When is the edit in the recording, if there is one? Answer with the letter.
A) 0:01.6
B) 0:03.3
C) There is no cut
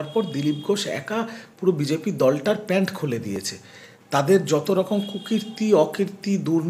C